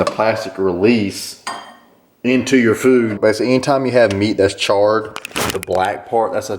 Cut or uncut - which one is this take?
cut